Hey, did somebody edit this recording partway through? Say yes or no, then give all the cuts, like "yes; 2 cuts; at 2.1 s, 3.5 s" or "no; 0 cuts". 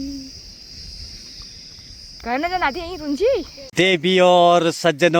yes; 1 cut; at 3.6 s